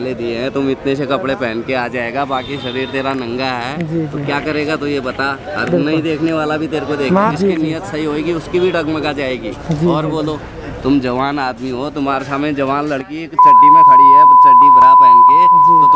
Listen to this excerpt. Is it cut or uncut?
uncut